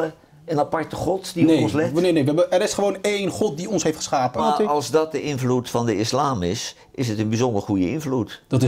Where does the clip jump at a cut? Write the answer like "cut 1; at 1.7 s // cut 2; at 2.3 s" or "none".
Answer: cut 1; at 4.4 s